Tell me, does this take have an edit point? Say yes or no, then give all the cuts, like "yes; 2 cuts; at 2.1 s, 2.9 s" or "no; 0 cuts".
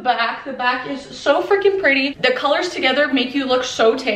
yes; 1 cut; at 2.1 s